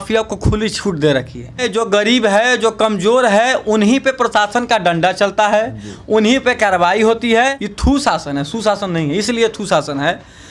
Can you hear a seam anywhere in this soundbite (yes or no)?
yes